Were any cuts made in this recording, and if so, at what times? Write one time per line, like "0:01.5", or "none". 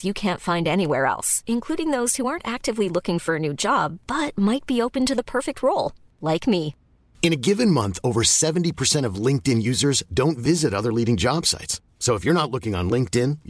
none